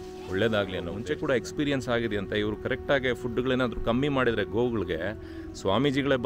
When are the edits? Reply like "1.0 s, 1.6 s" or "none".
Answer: 0.9 s